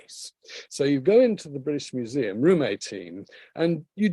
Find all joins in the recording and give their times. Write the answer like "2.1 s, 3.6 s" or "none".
none